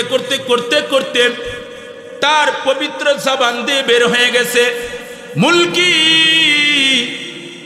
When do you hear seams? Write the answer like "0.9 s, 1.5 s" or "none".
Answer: none